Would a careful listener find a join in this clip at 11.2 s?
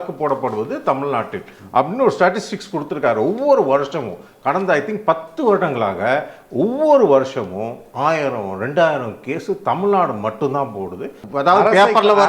yes; 1 cut; at 11.2 s

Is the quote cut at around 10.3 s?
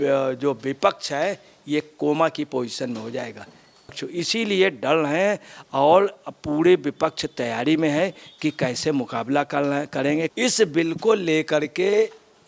yes; 2 cuts; at 4.0 s, 10.3 s

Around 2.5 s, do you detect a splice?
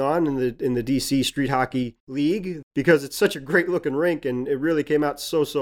yes; 1 cut; at 2.5 s

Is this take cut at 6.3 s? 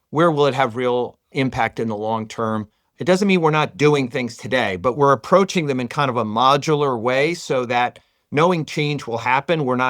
no; 2 cuts; at 1.2 s, 2.9 s

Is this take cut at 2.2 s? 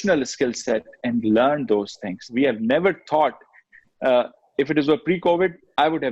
yes; 1 cut; at 2.2 s

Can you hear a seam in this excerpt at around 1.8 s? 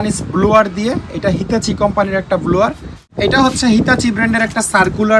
no; 1 cut; at 3.0 s

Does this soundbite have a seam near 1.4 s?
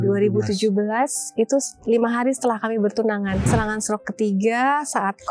no; 1 cut; at 3.5 s

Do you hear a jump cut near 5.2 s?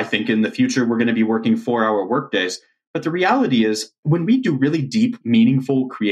yes; 2 cuts; at 3.9 s, 5.2 s

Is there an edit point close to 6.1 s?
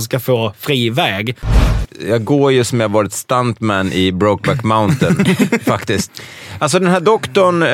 yes; 2 cuts; at 1.7 s, 6.1 s

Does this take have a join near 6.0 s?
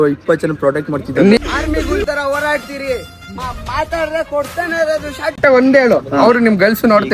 no; 0 cuts

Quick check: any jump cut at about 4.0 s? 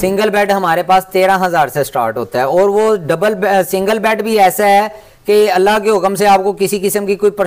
no; 0 cuts

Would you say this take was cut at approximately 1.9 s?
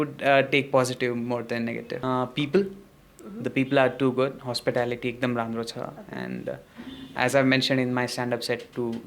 yes; 1 cut; at 1.9 s

